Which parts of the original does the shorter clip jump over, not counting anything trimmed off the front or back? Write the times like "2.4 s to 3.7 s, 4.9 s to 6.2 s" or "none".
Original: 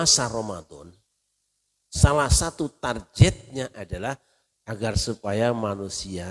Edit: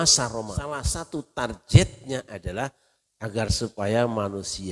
0.9 s to 2.4 s

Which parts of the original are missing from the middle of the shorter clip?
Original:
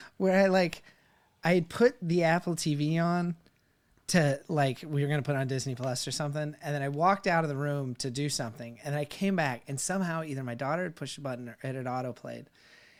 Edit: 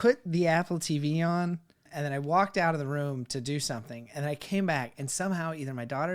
3.6 s to 6.6 s

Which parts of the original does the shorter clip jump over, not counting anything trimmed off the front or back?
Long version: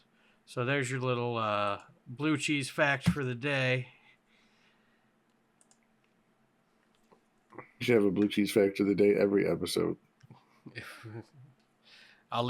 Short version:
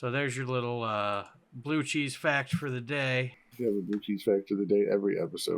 4.0 s to 7.7 s

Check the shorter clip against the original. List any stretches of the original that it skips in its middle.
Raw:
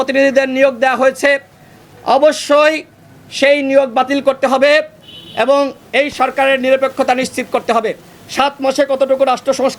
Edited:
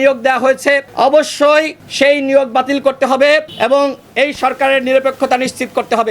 1.4 s to 2.0 s, 2.9 s to 3.2 s, 4.9 s to 5.3 s

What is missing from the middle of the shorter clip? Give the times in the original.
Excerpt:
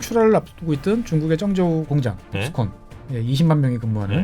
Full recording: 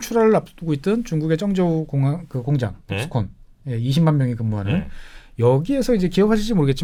1.9 s to 2.4 s

